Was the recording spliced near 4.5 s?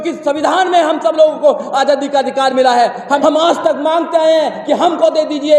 no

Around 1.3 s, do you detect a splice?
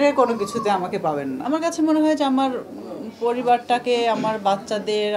yes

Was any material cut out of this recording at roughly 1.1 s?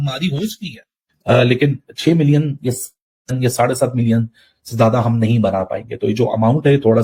no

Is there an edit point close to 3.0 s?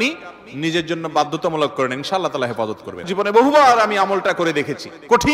yes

